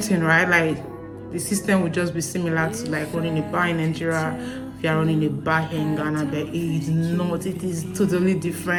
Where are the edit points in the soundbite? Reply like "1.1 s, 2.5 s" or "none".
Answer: none